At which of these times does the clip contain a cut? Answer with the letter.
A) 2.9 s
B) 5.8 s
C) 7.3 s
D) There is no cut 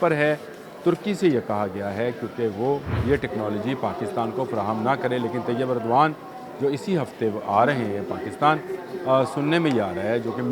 A